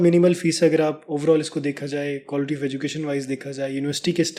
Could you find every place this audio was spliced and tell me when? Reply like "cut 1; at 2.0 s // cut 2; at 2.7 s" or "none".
none